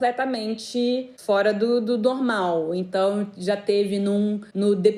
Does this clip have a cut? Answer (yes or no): no